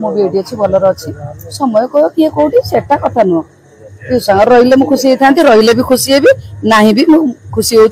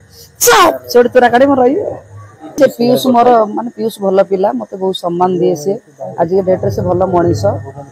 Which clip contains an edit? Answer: second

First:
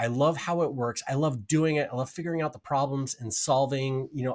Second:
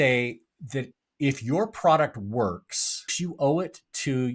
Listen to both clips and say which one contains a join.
second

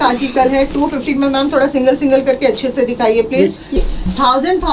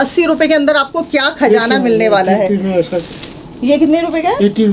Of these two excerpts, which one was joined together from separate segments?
first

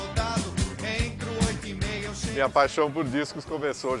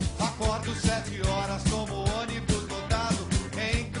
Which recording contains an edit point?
first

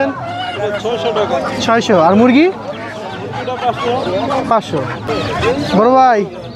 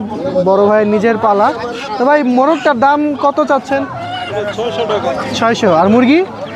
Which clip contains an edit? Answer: first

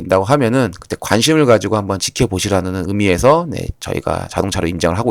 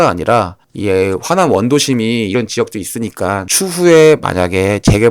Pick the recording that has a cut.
second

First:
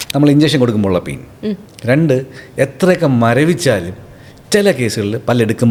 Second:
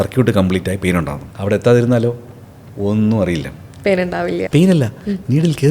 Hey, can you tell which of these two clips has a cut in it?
second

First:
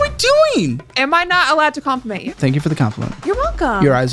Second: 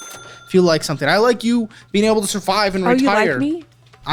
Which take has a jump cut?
first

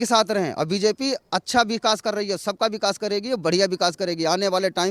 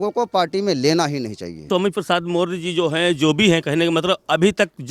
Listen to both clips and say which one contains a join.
second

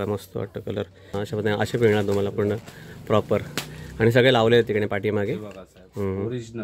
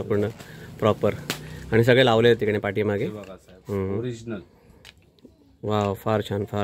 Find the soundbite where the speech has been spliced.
first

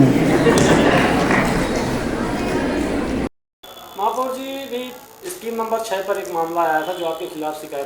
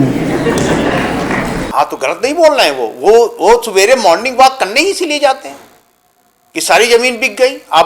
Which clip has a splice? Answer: second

